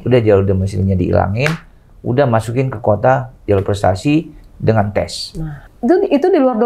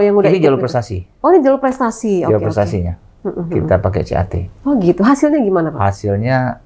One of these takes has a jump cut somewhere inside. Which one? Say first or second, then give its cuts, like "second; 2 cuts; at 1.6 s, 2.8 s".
first; 1 cut; at 5.6 s